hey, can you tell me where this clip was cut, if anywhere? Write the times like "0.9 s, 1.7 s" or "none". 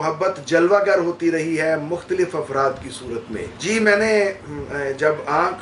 none